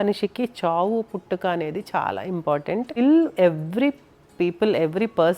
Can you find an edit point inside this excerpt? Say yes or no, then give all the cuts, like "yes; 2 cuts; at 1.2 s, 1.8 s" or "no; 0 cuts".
yes; 1 cut; at 3.0 s